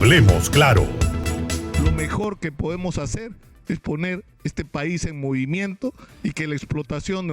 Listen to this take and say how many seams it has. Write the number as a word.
one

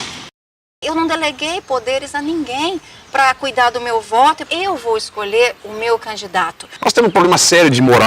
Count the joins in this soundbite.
one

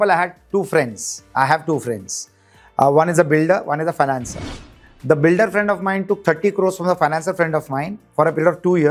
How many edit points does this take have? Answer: zero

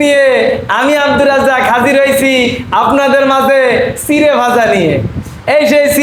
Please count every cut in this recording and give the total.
zero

